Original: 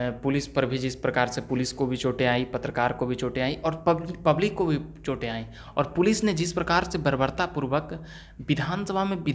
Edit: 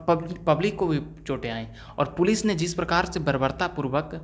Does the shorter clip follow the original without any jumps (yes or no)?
yes